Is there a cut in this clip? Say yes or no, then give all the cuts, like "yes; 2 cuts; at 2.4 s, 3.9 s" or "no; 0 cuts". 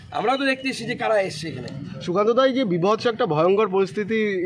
no; 0 cuts